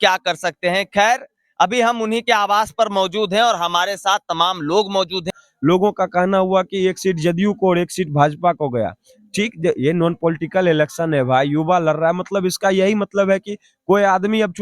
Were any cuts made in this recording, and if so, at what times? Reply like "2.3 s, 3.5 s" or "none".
5.3 s